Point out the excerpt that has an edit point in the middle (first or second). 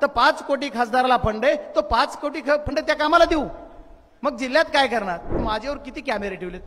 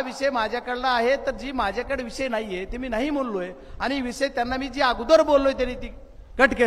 first